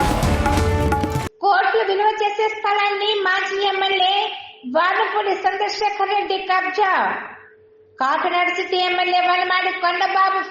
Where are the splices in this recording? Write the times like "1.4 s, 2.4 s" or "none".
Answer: 1.2 s